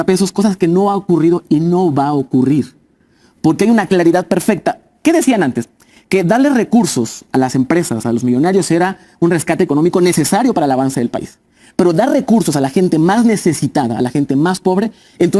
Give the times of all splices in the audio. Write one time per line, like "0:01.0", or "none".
none